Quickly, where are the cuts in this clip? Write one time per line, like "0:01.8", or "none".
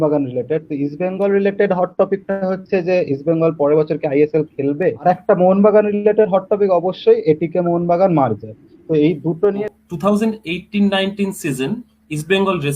0:05.0
0:09.7